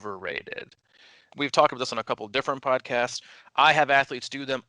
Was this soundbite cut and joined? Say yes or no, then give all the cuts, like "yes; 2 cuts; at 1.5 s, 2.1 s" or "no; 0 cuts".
yes; 1 cut; at 1.3 s